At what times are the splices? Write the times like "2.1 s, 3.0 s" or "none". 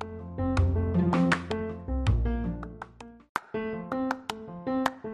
3.3 s

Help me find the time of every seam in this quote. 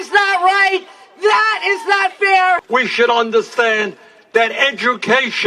2.6 s

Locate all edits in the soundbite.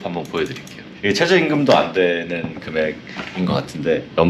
none

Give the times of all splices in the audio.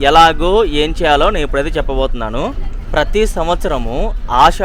none

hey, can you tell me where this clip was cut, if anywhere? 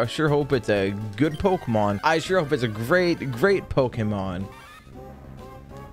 2.0 s, 4.5 s

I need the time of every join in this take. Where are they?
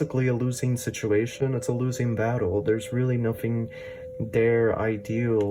none

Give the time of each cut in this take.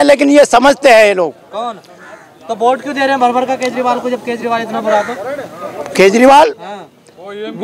none

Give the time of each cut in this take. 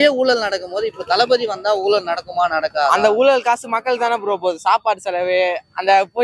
none

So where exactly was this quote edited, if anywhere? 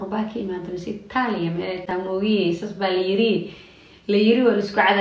none

